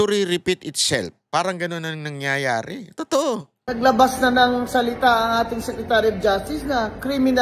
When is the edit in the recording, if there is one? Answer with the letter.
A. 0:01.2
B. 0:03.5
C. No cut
B